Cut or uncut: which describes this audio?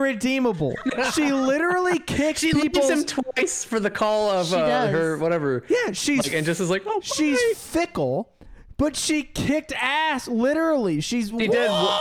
uncut